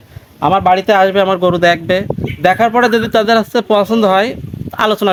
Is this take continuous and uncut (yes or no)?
yes